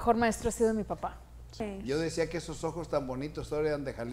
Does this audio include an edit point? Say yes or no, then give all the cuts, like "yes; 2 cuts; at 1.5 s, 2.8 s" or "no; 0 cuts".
yes; 1 cut; at 1.6 s